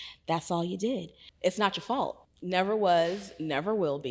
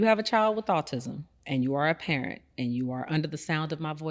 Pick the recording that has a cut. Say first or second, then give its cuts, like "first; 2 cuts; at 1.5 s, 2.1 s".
first; 2 cuts; at 1.2 s, 2.3 s